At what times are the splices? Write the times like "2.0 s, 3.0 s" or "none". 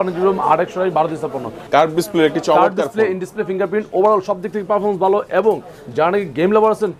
1.6 s

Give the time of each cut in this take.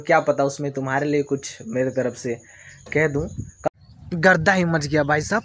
3.6 s

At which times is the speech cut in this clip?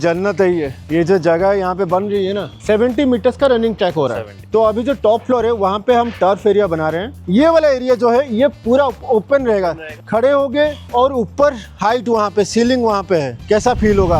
2.5 s, 4.4 s, 7.2 s, 10.0 s

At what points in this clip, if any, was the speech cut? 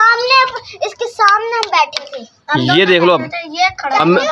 2.7 s

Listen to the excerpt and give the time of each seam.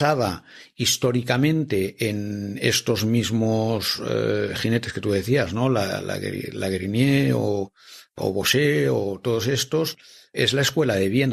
10.3 s

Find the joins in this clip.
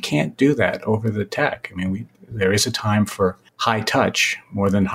3.5 s

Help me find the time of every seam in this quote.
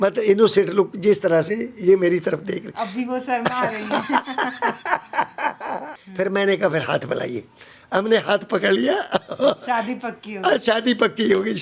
6.0 s

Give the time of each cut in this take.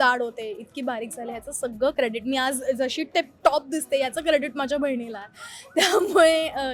none

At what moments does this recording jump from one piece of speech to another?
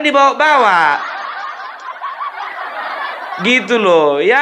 1.1 s, 2.8 s

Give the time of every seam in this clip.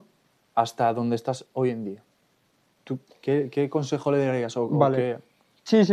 none

